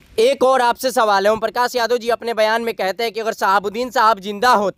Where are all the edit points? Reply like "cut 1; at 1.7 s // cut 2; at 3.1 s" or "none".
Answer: none

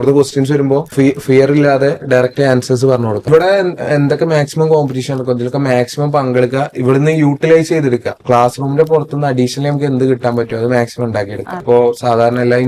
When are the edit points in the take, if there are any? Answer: cut 1; at 0.9 s // cut 2; at 3.2 s // cut 3; at 8.1 s // cut 4; at 11.6 s

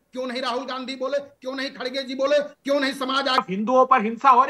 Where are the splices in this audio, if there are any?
cut 1; at 3.4 s

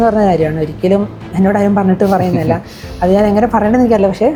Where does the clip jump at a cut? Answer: none

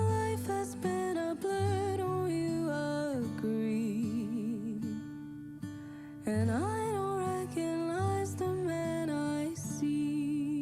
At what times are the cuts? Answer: cut 1; at 5.1 s

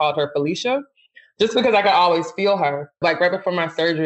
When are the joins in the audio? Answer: cut 1; at 3.0 s

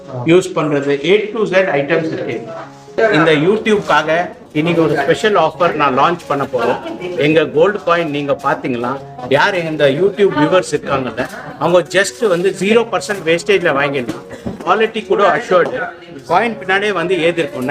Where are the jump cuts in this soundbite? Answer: cut 1; at 3.0 s

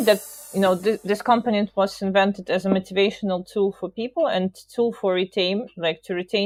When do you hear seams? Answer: none

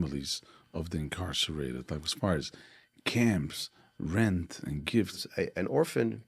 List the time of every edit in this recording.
cut 1; at 5.2 s

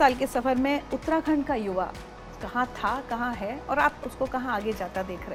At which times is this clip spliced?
none

